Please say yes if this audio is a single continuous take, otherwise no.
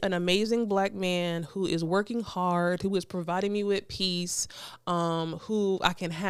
yes